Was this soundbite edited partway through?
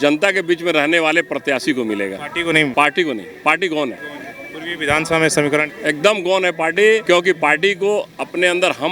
no; 0 cuts

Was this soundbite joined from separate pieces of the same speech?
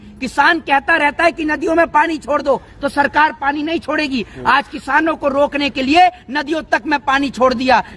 no; 0 cuts

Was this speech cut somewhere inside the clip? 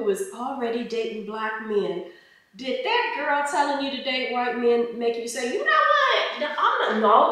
no; 0 cuts

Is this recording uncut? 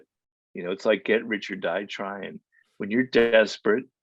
yes; 0 cuts

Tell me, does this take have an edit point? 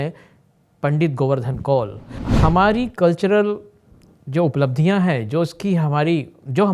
yes; 1 cut; at 2.2 s

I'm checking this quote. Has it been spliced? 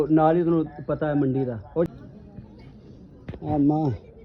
yes; 1 cut; at 1.9 s

